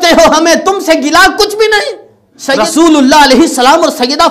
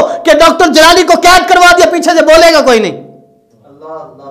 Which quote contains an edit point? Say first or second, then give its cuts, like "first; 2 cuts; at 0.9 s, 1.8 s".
first; 1 cut; at 2.4 s